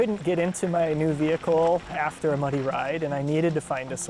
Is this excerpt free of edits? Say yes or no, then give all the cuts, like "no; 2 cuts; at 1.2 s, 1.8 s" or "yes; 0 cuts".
yes; 0 cuts